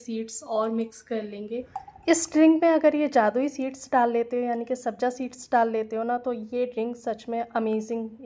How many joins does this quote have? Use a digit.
0